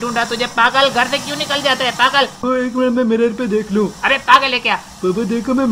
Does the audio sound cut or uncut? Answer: cut